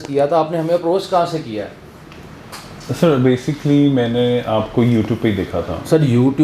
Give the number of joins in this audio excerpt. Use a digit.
0